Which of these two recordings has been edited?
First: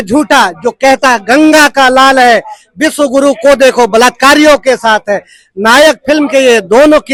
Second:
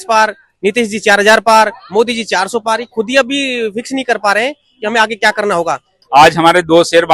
second; 1 cut; at 6.0 s

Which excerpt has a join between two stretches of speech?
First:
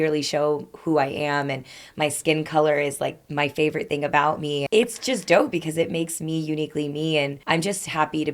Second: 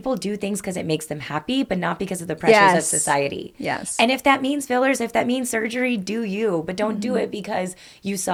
first; 2 cuts; at 4.6 s, 7.4 s

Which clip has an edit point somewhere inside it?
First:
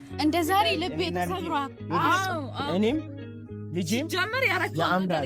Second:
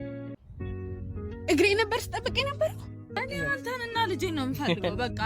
second; 1 cut; at 3.2 s

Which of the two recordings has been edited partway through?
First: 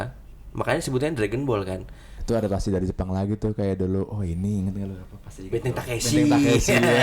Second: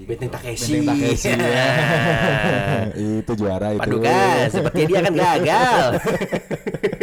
first; 1 cut; at 2.1 s

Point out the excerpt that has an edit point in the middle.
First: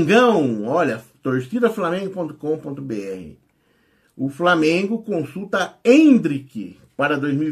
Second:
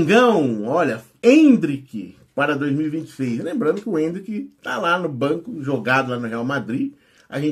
second; 1 cut; at 1.1 s

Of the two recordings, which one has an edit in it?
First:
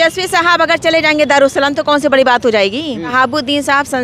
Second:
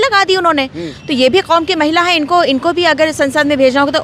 first; 1 cut; at 3.1 s

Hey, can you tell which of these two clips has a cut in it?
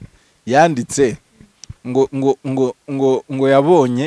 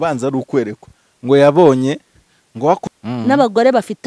second; 1 cut; at 2.8 s

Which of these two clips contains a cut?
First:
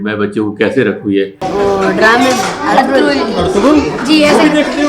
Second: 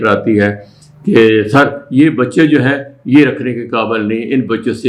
first; 1 cut; at 1.5 s

